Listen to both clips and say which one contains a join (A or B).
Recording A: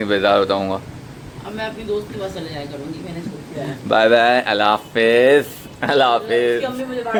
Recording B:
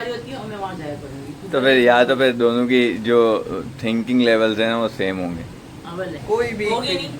B